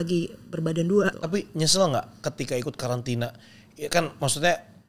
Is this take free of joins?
no; 1 cut; at 1.2 s

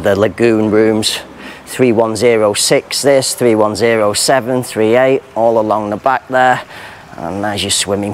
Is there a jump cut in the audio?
no; 0 cuts

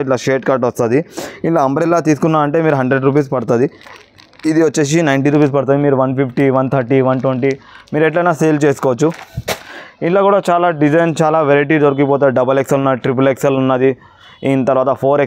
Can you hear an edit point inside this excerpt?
no; 0 cuts

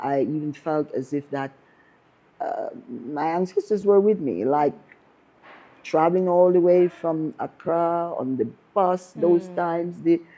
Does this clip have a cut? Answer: no; 0 cuts

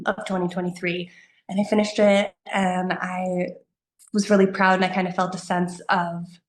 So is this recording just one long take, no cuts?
yes; 0 cuts

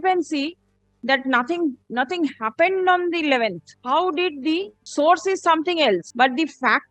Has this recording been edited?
yes; 3 cuts; at 3.7 s, 4.8 s, 6.1 s

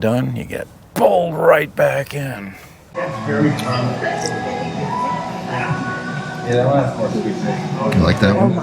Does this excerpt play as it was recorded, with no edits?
no; 1 cut; at 2.9 s

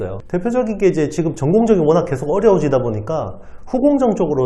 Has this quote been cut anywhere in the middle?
no; 0 cuts

